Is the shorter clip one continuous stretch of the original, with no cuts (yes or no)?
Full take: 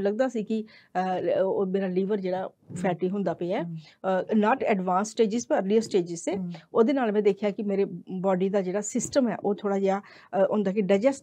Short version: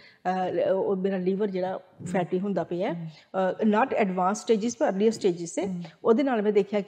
yes